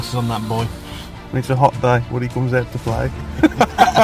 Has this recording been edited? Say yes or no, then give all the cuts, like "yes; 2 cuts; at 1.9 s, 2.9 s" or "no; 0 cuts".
no; 0 cuts